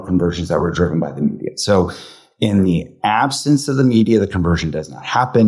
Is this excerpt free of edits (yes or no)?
yes